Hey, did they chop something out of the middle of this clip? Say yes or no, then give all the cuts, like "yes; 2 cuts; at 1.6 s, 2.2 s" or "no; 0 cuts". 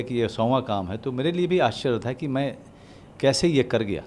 no; 0 cuts